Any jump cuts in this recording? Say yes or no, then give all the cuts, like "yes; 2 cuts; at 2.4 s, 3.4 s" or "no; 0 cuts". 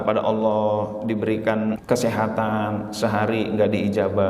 yes; 1 cut; at 1.8 s